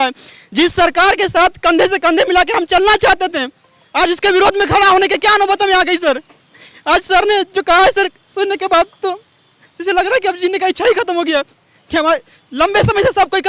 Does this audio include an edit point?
no; 0 cuts

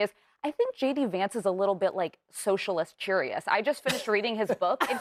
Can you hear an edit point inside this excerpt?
no; 0 cuts

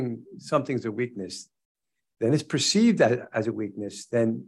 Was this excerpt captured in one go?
yes; 0 cuts

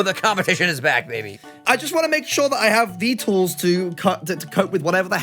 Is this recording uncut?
no; 1 cut; at 1.6 s

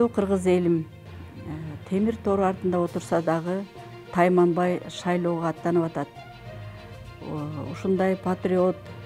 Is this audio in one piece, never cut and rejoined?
yes; 0 cuts

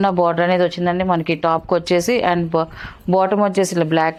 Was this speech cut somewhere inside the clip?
no; 0 cuts

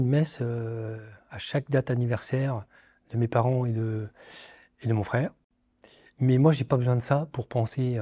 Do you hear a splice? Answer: no; 0 cuts

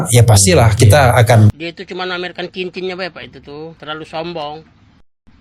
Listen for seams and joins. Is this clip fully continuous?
no; 1 cut; at 1.5 s

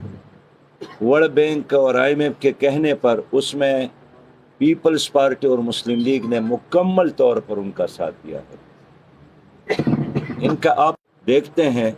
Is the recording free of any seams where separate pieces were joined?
no; 1 cut; at 11.1 s

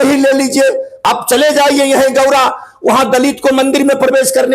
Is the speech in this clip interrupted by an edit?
yes; 1 cut; at 0.9 s

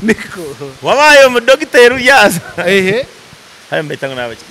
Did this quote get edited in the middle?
no; 0 cuts

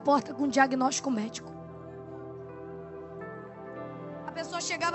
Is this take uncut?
yes; 0 cuts

